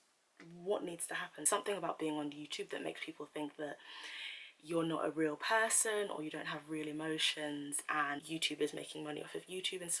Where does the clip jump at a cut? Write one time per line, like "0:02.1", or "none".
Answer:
0:01.4
0:08.2